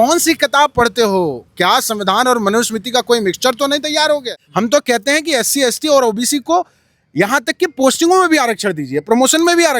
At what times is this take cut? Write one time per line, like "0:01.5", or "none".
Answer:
0:04.4